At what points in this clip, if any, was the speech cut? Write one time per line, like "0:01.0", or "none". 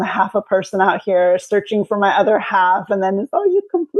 none